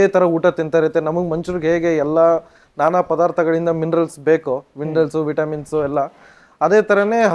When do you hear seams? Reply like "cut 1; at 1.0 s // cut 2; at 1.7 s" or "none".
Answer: none